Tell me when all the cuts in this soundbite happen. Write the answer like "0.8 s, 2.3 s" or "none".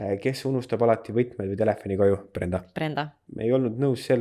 3.2 s